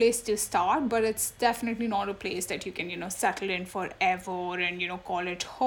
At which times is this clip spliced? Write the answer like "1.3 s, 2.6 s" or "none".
none